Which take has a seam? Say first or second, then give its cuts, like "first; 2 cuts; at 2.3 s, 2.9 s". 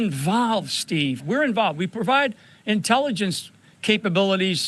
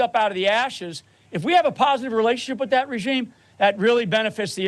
first; 1 cut; at 1.2 s